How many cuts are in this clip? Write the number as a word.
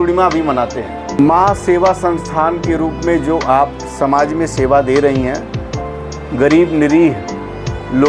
one